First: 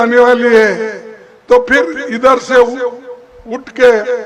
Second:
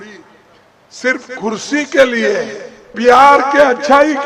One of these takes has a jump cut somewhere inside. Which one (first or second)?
second